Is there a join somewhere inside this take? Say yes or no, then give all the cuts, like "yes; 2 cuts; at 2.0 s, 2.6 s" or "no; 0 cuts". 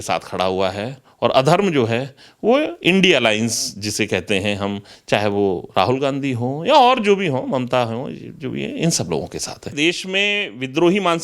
yes; 1 cut; at 9.7 s